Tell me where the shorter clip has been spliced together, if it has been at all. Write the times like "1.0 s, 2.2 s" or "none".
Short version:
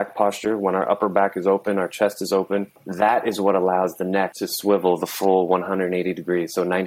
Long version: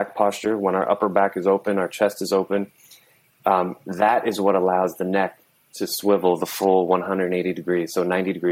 2.8 s, 4.4 s